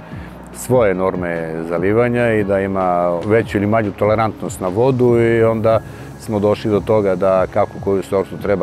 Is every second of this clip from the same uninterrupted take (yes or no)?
no